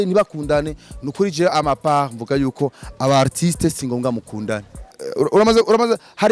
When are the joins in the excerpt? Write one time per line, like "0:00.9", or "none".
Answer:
0:05.0